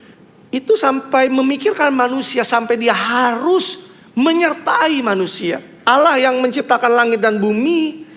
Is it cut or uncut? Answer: cut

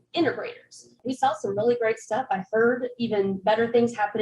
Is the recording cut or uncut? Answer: cut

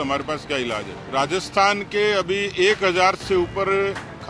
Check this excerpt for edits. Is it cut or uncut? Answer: cut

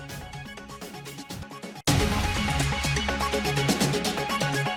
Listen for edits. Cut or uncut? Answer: uncut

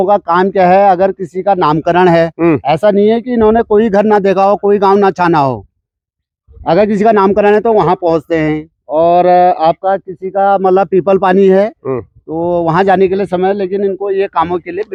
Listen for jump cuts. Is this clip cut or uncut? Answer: uncut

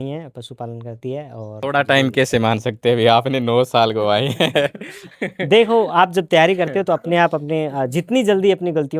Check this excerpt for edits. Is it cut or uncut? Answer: cut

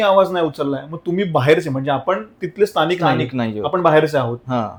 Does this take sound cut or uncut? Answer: uncut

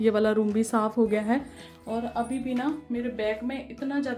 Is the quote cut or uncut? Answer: uncut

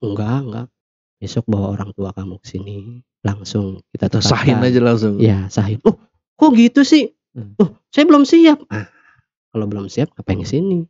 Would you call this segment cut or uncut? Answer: uncut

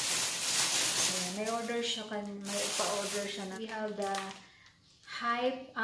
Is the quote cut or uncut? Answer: cut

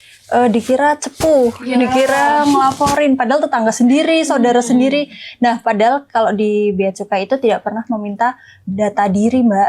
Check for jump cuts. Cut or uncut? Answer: uncut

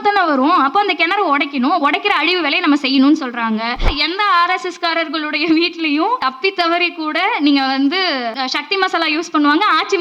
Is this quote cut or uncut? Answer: cut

